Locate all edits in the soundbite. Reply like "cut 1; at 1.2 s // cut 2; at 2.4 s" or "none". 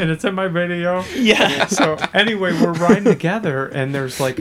cut 1; at 1.5 s